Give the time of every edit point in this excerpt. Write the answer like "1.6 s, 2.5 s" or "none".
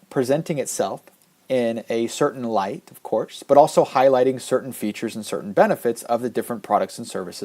5.1 s

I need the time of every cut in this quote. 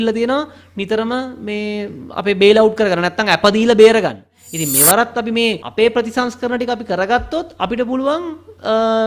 4.4 s, 5.6 s

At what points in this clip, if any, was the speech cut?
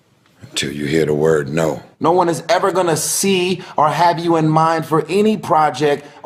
1.9 s

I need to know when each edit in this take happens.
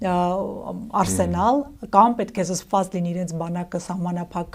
none

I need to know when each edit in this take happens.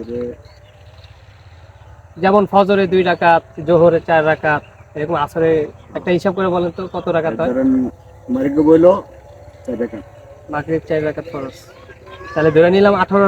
8.1 s

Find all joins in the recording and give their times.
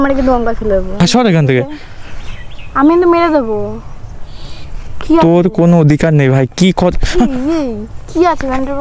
0.9 s

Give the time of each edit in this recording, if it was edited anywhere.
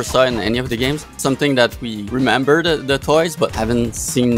1.1 s, 1.9 s, 3.5 s

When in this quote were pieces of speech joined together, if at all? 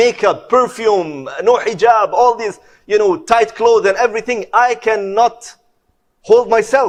none

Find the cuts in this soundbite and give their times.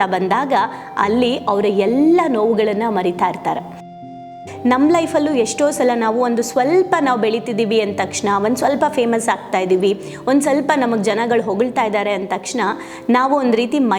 4.2 s

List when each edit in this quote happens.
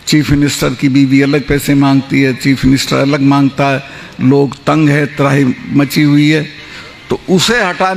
none

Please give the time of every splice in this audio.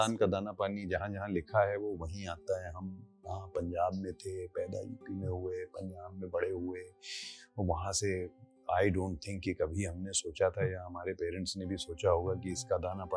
none

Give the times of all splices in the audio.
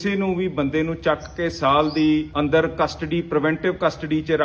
2.3 s

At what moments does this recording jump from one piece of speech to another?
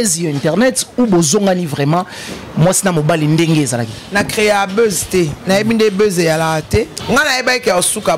7.0 s

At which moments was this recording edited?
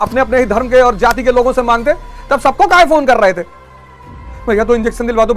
none

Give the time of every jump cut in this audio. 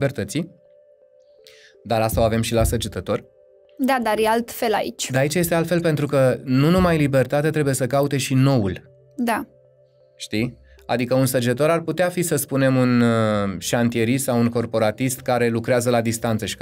none

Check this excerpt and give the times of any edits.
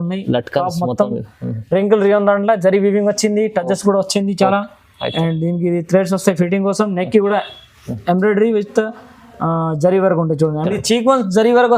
10.7 s

